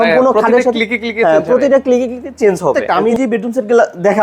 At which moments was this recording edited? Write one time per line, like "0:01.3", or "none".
0:02.9